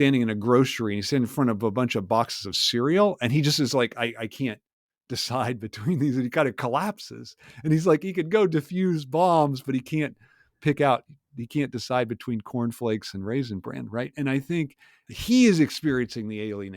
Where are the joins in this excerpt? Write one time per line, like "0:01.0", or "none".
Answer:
0:15.1